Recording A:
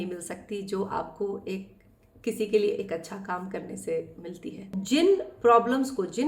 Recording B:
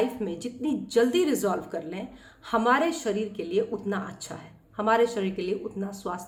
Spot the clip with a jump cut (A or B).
A